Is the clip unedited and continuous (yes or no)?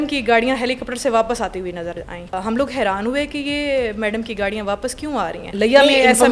no